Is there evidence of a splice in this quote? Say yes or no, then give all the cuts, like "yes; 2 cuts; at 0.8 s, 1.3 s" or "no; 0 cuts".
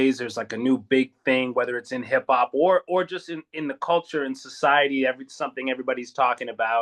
no; 0 cuts